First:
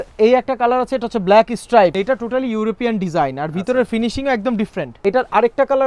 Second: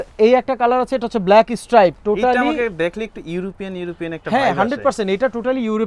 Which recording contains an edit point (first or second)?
first